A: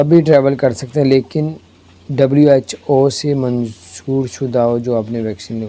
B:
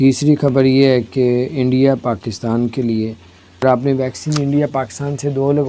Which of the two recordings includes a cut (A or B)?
B